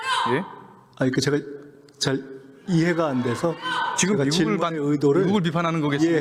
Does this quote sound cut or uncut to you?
uncut